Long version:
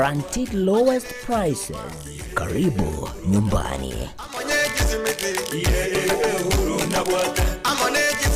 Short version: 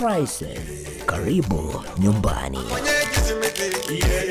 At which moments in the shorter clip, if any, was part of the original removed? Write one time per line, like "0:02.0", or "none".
0:02.7